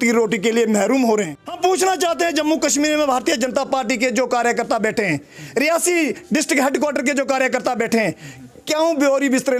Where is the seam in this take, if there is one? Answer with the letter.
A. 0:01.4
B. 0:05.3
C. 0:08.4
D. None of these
A